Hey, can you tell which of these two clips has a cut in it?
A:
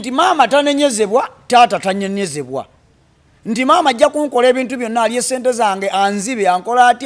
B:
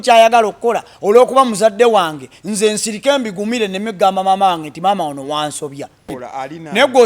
B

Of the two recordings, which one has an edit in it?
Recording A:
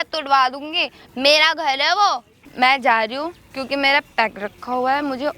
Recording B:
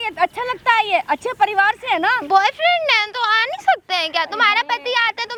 A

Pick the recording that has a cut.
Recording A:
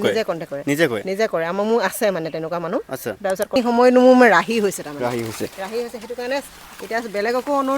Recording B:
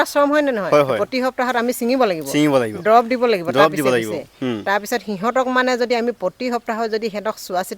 A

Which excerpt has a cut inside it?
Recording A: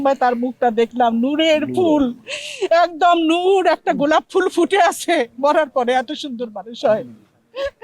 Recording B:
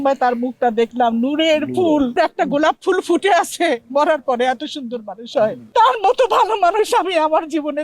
B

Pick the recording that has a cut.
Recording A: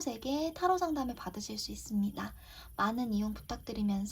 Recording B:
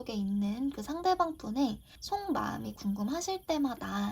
B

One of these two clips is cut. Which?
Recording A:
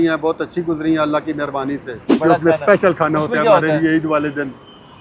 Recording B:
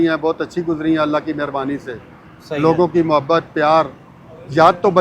A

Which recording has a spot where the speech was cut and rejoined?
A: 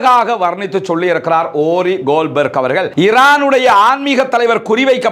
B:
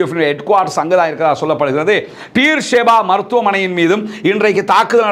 A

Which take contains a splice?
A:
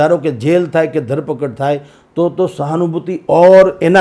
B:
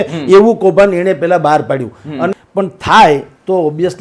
B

